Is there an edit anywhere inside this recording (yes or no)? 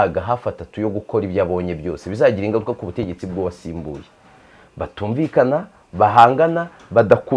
no